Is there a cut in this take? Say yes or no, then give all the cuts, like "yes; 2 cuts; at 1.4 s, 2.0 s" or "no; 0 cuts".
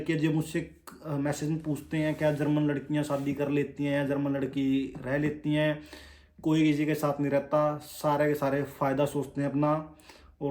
no; 0 cuts